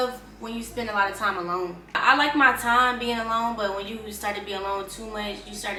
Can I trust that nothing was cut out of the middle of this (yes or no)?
yes